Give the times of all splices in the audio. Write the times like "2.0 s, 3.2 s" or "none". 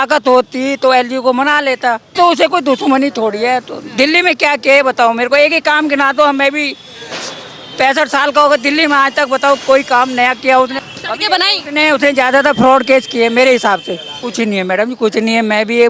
2.1 s, 10.8 s, 14.2 s